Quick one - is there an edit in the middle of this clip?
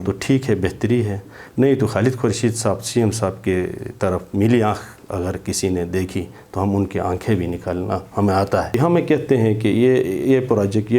yes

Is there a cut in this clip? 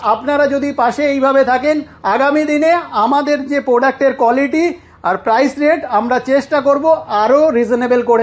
no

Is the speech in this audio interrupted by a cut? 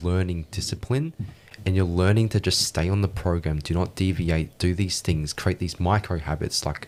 no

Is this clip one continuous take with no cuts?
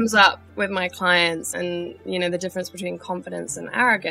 no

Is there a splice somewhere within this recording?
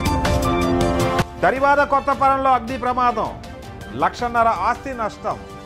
no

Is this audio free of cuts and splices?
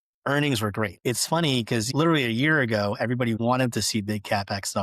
no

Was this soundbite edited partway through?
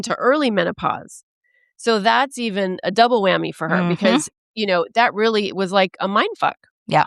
no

